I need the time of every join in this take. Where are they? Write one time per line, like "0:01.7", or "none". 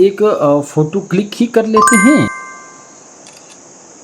0:02.3